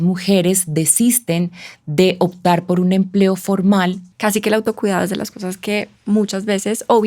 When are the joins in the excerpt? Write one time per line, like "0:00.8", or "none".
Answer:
0:04.1